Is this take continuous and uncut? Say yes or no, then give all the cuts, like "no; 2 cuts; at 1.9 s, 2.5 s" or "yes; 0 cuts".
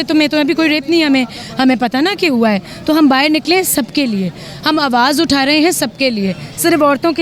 yes; 0 cuts